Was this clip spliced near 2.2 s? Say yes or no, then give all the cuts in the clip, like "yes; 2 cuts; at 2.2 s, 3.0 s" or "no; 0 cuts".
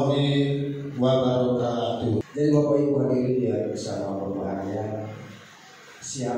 yes; 1 cut; at 2.2 s